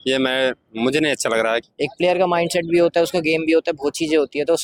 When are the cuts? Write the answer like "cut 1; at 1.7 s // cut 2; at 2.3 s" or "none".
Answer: cut 1; at 1.7 s